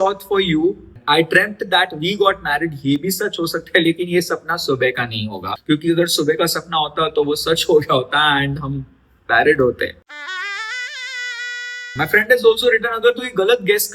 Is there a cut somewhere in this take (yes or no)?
yes